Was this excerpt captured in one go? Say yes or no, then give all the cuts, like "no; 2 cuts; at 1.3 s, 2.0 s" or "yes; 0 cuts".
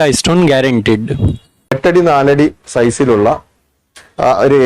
no; 1 cut; at 1.8 s